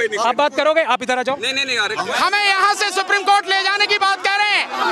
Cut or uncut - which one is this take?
cut